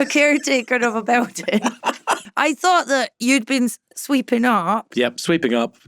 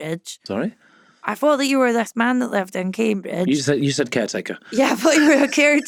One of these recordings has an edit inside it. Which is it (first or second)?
first